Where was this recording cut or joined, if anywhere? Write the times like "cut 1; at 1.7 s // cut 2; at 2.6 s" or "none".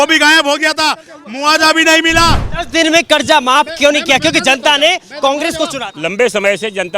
cut 1; at 2.5 s // cut 2; at 5.9 s